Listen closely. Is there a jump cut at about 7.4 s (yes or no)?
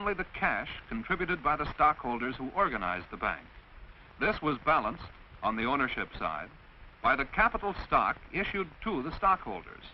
no